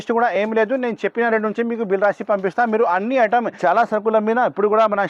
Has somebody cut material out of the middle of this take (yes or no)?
yes